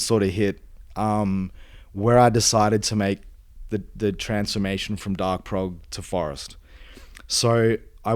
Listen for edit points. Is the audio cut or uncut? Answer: uncut